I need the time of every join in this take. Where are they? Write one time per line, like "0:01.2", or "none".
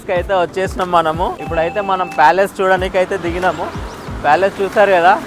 0:01.3